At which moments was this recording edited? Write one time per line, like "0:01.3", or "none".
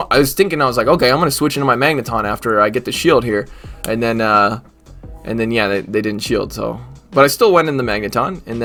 none